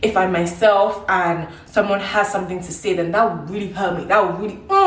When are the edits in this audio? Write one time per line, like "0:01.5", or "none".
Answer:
none